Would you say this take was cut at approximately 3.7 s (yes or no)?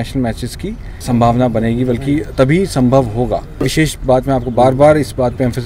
yes